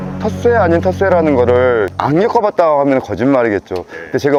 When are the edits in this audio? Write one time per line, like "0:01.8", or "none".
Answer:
none